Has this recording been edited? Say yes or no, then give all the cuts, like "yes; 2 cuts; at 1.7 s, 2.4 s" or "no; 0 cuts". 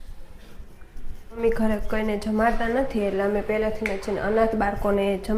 yes; 1 cut; at 1.4 s